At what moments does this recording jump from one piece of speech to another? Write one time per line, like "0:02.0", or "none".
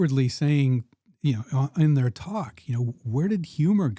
none